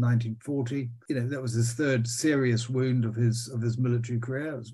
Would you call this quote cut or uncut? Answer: uncut